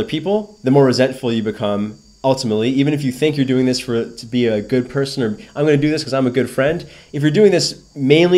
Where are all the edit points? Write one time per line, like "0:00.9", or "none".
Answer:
none